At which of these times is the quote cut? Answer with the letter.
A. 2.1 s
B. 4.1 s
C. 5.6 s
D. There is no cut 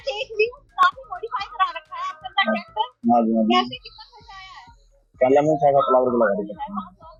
D